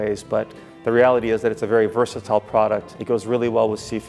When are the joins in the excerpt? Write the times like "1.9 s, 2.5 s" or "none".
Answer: 2.9 s